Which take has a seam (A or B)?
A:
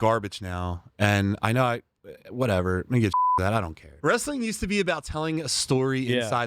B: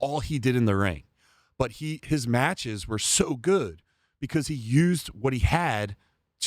A